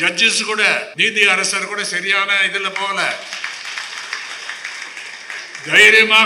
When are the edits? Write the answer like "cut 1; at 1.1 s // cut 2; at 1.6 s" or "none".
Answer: cut 1; at 0.9 s